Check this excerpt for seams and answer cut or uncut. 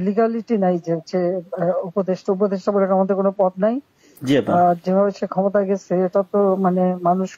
uncut